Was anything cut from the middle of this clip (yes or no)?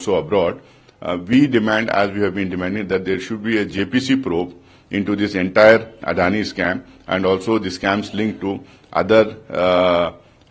no